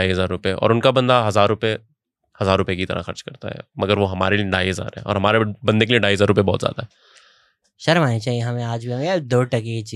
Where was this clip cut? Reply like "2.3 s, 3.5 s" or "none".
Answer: none